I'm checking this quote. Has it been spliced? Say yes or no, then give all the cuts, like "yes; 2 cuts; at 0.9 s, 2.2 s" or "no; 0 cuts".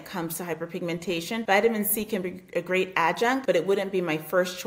yes; 2 cuts; at 1.4 s, 3.4 s